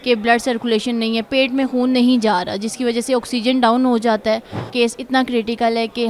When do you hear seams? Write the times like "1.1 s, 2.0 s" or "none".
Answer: 4.6 s